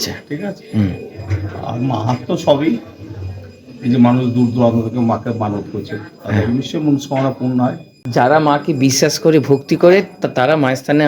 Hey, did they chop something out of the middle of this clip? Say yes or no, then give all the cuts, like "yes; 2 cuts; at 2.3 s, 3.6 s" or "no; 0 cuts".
yes; 1 cut; at 8.0 s